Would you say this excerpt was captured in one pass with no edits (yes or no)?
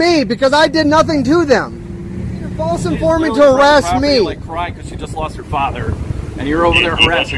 yes